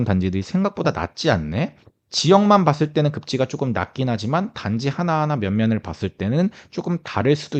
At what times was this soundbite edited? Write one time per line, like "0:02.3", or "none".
none

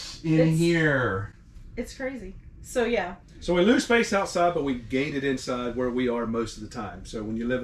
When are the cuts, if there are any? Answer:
none

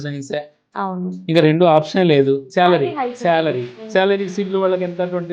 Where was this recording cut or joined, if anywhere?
0:02.5

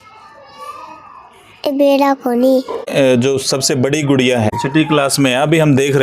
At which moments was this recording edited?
0:02.8
0:04.5

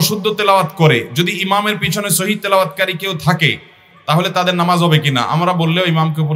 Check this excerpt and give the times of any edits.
none

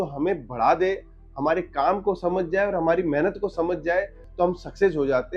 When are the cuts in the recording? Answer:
0:04.2

